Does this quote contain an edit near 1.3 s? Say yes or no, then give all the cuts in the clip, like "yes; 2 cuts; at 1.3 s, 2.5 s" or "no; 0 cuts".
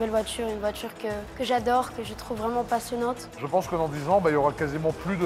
yes; 2 cuts; at 1.3 s, 3.3 s